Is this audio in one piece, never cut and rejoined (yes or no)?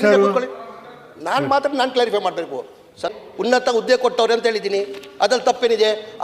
no